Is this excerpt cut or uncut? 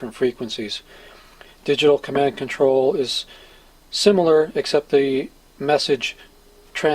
cut